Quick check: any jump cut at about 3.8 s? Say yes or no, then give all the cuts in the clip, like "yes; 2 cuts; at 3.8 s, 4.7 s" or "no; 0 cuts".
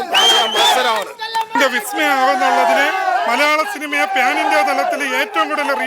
no; 1 cut; at 1.5 s